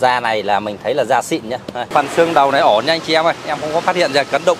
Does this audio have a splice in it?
yes; 1 cut; at 1.9 s

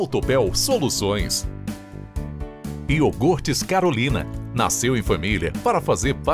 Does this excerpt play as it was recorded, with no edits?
no; 2 cuts; at 1.3 s, 2.9 s

